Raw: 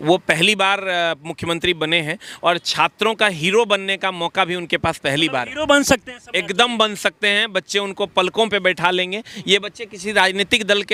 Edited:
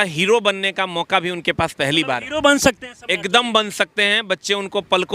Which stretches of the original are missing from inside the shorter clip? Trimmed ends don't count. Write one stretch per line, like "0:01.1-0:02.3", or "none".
none